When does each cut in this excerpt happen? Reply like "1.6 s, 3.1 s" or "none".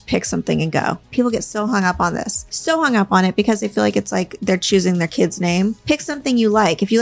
1.1 s, 2.5 s, 5.8 s